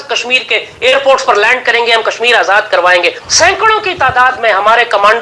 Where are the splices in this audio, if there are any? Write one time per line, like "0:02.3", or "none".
none